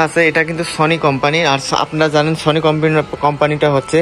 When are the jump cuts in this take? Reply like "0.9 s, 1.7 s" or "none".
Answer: none

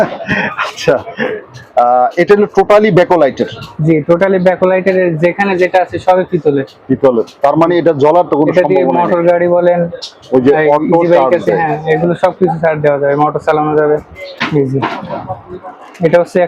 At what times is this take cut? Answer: 14.4 s

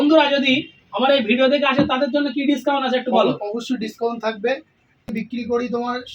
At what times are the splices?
5.1 s

